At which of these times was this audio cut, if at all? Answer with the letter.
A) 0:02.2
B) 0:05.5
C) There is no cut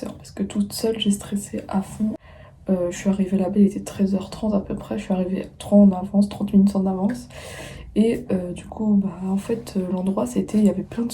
A